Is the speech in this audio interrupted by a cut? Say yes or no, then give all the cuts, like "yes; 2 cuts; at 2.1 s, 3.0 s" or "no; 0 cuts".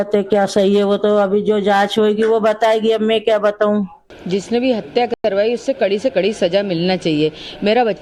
no; 0 cuts